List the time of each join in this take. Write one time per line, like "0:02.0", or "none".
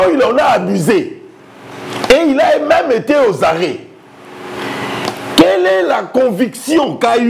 none